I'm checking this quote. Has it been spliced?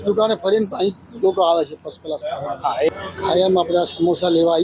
yes; 1 cut; at 2.9 s

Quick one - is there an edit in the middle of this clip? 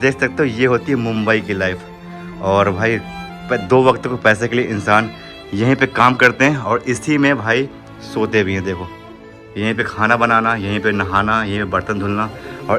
no; 0 cuts

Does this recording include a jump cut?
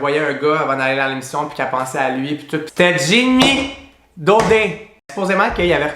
yes; 2 cuts; at 2.7 s, 5.1 s

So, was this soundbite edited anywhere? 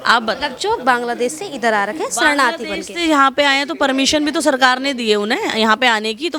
no; 0 cuts

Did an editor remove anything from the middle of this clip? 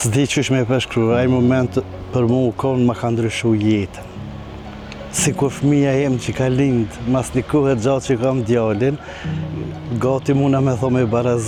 no; 0 cuts

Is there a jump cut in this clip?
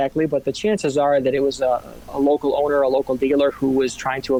no; 0 cuts

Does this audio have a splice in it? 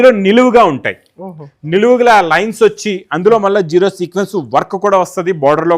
no; 0 cuts

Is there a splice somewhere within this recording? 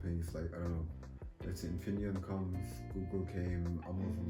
no; 0 cuts

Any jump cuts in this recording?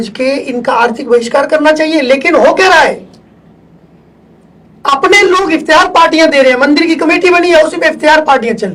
no; 0 cuts

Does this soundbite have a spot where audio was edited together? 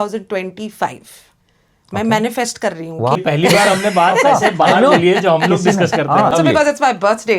yes; 2 cuts; at 3.2 s, 6.3 s

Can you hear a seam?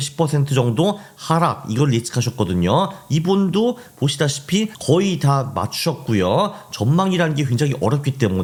no; 0 cuts

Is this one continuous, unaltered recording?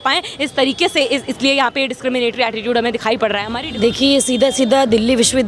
no; 1 cut; at 3.5 s

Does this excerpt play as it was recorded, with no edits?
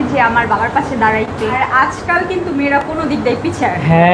no; 1 cut; at 1.6 s

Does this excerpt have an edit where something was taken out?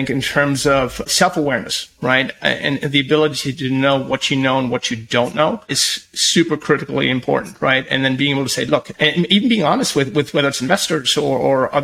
yes; 3 cuts; at 1.1 s, 5.8 s, 8.9 s

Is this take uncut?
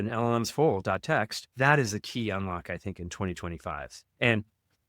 no; 1 cut; at 1.5 s

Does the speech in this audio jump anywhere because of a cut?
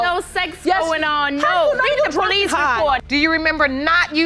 yes; 1 cut; at 3.0 s

